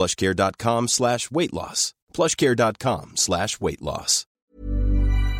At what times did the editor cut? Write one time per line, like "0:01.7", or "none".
0:04.2